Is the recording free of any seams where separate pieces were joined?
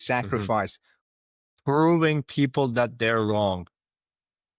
no; 1 cut; at 1.0 s

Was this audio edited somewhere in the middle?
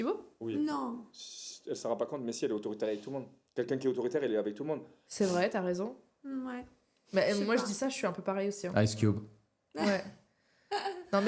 no; 0 cuts

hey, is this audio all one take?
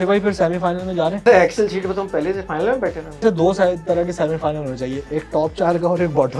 no; 2 cuts; at 1.2 s, 3.2 s

